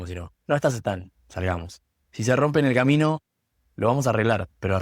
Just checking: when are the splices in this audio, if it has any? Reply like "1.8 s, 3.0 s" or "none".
none